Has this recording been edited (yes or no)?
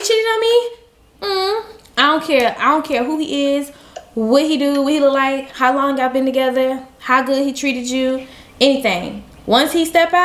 no